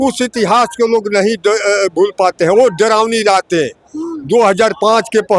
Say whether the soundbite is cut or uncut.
uncut